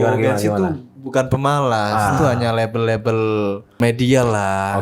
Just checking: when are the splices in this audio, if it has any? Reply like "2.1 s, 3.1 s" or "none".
3.8 s